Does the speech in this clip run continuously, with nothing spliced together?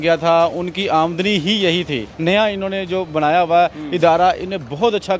no; 1 cut; at 2.1 s

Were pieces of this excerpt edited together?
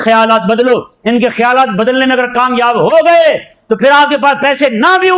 no; 0 cuts

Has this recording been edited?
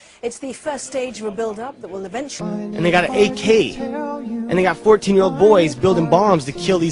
no; 0 cuts

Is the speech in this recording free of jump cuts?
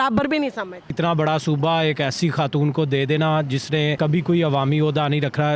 no; 2 cuts; at 0.9 s, 4.0 s

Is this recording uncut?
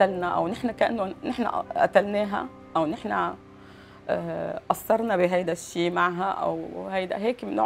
yes; 0 cuts

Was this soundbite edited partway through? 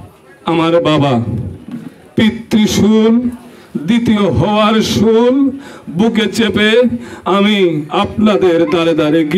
no; 0 cuts

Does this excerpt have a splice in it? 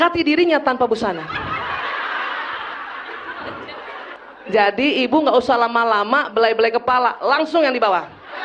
yes; 1 cut; at 4.2 s

